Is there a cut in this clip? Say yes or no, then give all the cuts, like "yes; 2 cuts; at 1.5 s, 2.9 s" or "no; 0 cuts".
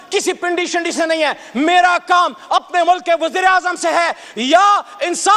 no; 0 cuts